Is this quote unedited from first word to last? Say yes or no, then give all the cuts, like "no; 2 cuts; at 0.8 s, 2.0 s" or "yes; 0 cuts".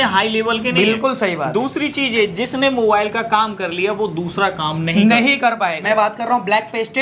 no; 1 cut; at 5.8 s